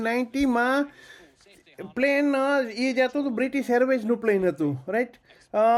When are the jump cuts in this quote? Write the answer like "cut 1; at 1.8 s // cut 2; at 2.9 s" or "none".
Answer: none